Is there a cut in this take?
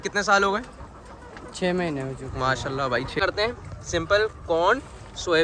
yes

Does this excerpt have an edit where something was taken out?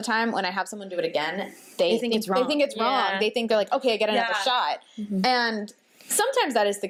no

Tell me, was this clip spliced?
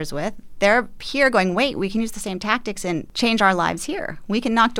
yes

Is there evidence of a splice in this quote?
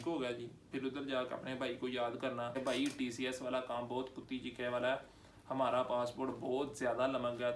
yes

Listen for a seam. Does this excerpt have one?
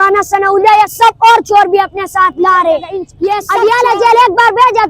yes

